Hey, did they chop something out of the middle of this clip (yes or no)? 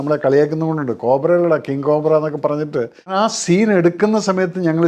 yes